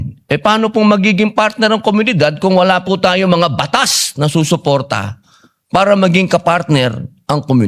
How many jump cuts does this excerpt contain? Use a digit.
0